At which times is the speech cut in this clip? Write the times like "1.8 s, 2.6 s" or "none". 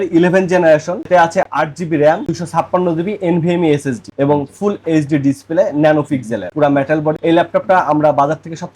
none